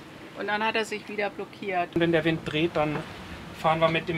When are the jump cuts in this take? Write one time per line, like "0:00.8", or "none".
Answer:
0:02.0